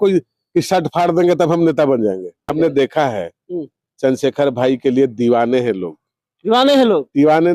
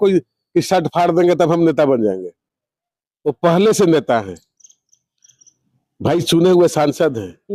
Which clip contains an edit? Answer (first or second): first